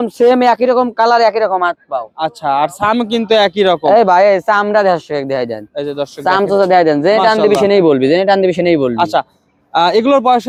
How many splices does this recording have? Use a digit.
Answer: 0